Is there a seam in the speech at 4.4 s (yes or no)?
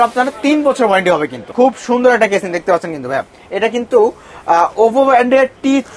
no